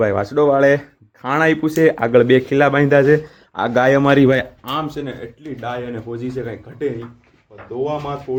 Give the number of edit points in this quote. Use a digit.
0